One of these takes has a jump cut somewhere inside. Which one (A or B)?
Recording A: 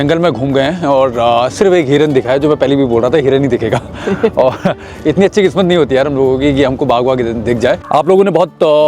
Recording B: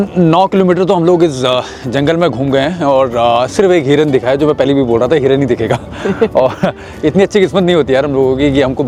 A